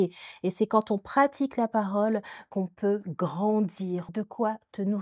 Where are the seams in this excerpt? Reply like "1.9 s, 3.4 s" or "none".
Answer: 4.1 s